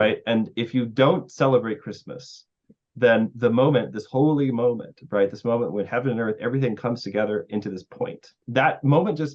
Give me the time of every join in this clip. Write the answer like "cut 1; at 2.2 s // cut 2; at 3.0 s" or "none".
cut 1; at 8.4 s